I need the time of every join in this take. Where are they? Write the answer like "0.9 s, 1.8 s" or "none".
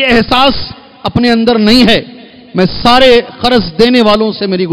none